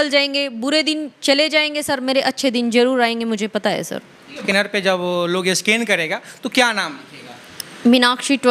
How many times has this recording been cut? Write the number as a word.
one